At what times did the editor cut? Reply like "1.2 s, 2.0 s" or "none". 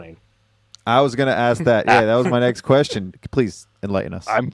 3.1 s